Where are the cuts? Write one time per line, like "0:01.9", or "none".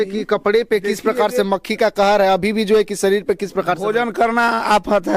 none